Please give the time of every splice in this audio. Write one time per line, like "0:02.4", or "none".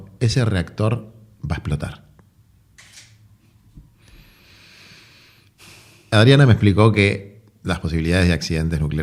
none